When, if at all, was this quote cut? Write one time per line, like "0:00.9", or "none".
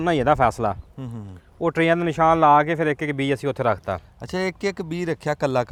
none